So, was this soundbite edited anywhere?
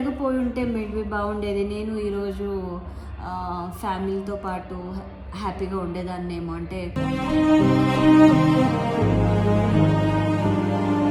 no; 0 cuts

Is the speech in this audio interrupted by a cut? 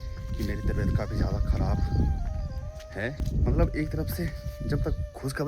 yes; 1 cut; at 3.2 s

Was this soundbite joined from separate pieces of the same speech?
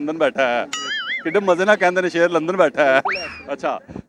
no; 0 cuts

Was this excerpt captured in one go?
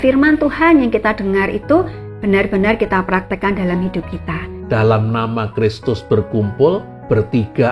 no; 1 cut; at 4.6 s

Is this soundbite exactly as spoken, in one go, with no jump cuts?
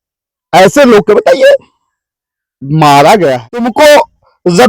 no; 1 cut; at 3.7 s

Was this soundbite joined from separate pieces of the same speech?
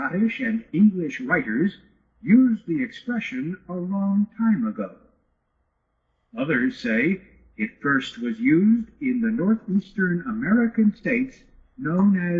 no; 0 cuts

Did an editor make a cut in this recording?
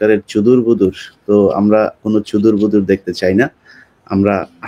no; 0 cuts

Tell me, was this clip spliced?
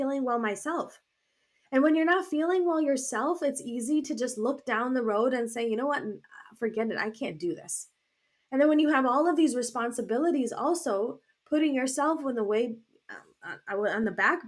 no; 0 cuts

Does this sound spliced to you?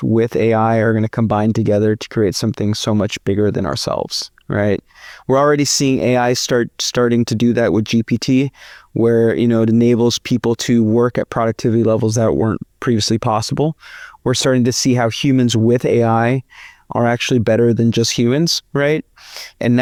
no; 0 cuts

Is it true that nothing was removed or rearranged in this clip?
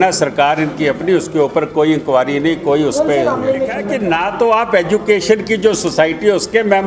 no; 1 cut; at 3.9 s

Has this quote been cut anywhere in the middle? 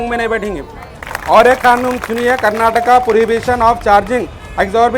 yes; 1 cut; at 1.0 s

